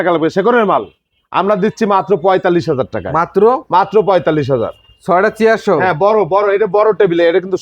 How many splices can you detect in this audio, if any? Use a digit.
0